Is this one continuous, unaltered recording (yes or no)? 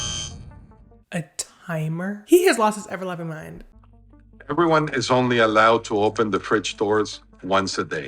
no